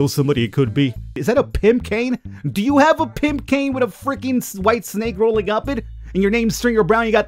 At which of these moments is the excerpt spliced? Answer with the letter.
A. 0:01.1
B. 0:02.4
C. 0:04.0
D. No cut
A